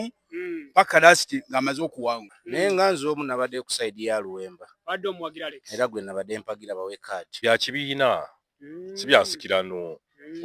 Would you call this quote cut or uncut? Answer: cut